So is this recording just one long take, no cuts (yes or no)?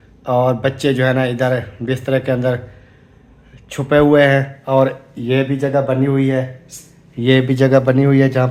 yes